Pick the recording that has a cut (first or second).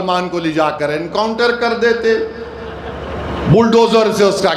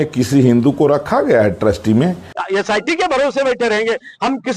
second